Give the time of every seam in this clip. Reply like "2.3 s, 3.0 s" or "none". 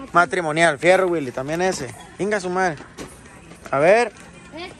none